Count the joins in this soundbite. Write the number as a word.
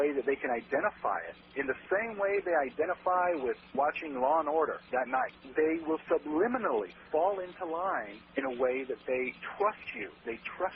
one